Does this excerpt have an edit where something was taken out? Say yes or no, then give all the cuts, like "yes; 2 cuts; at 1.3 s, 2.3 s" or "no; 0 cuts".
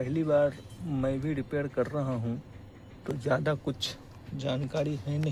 no; 0 cuts